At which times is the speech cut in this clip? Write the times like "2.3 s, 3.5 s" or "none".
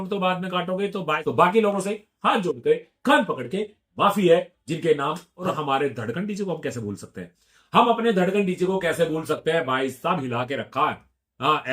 1.2 s, 5.3 s